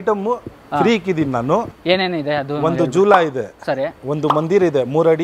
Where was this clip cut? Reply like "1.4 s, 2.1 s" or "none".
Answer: 1.7 s